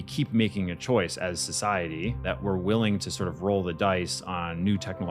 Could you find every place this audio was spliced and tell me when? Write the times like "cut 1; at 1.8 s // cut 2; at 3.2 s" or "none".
none

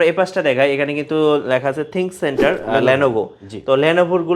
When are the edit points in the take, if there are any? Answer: none

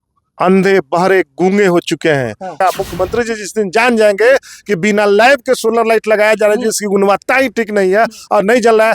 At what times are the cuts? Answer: cut 1; at 2.6 s

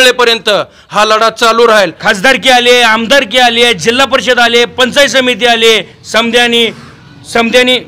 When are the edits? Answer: cut 1; at 2.0 s

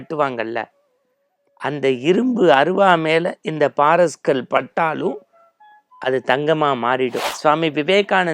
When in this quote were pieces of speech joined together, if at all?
cut 1; at 7.3 s

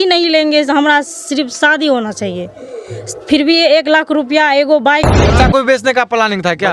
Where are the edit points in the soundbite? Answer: cut 1; at 5.2 s

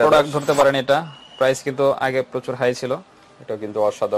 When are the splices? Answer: none

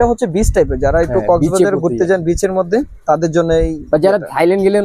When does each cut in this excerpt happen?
none

